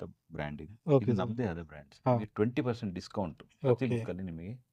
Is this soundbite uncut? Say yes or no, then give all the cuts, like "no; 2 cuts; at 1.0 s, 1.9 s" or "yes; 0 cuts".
no; 1 cut; at 2.3 s